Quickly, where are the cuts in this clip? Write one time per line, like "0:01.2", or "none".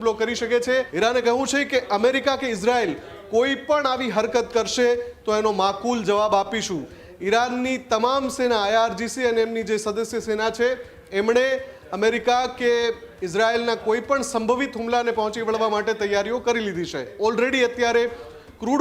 0:00.9
0:17.1